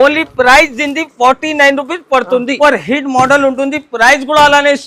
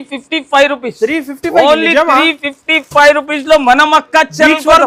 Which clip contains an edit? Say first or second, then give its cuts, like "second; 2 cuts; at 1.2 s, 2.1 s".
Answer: first; 1 cut; at 2.5 s